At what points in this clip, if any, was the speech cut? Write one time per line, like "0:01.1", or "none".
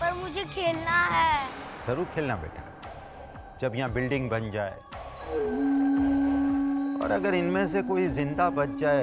none